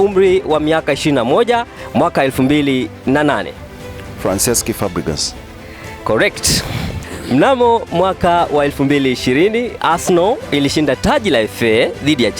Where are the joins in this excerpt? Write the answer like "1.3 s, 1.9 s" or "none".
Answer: 7.0 s